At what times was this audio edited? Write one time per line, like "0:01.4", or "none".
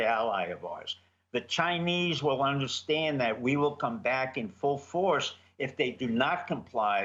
none